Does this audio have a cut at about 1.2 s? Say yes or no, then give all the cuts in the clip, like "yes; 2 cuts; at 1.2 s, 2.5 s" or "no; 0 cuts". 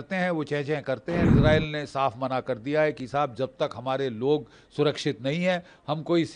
yes; 1 cut; at 1.2 s